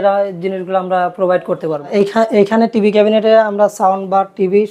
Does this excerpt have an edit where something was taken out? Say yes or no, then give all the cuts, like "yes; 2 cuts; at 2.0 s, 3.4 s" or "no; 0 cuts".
yes; 1 cut; at 1.9 s